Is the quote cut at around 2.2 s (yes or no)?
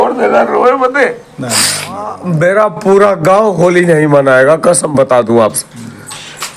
yes